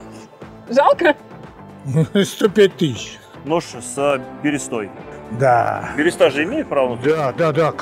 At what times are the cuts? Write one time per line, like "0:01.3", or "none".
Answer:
0:03.3